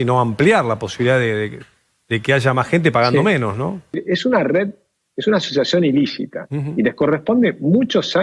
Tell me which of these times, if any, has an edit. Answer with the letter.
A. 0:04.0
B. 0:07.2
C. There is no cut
A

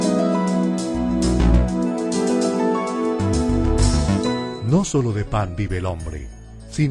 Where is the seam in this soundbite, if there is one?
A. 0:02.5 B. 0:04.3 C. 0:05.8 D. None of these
B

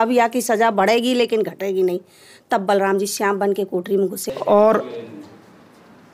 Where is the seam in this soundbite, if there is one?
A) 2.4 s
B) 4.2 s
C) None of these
B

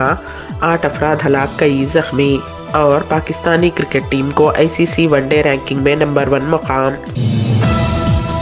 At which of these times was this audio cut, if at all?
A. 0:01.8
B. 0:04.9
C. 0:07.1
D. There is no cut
C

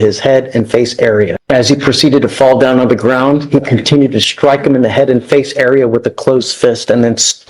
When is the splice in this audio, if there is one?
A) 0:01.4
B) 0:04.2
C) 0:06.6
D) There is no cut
A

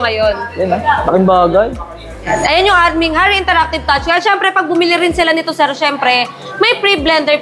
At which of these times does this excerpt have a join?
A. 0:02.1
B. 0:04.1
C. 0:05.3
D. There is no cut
A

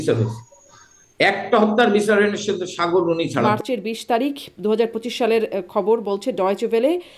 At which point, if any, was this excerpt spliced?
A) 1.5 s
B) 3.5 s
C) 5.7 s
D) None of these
B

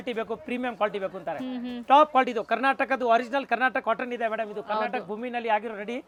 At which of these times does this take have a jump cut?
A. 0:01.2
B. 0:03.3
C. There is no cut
C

